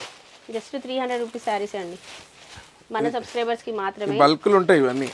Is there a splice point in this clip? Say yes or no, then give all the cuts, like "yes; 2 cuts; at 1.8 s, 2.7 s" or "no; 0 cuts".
no; 0 cuts